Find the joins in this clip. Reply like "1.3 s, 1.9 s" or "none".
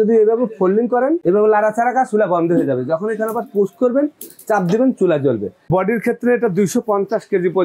1.2 s, 5.7 s